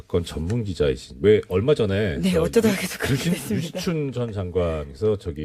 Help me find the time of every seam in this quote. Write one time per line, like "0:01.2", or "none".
0:03.7